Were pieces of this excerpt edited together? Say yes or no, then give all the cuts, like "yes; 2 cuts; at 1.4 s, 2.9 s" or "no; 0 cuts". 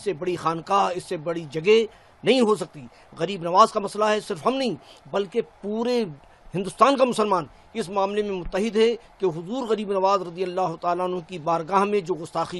no; 0 cuts